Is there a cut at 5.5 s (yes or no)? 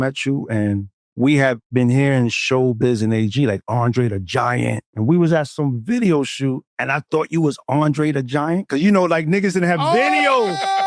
yes